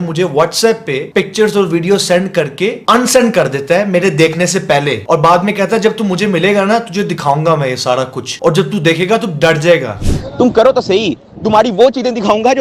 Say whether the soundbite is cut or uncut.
uncut